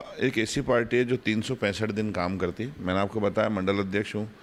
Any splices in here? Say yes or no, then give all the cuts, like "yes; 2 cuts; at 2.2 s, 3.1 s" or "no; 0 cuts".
no; 0 cuts